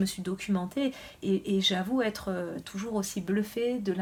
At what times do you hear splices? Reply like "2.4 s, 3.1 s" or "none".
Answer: none